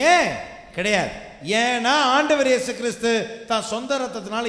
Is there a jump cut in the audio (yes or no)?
yes